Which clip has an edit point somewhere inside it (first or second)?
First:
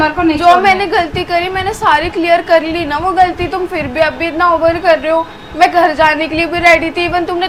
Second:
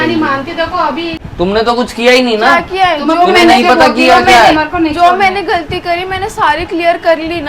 second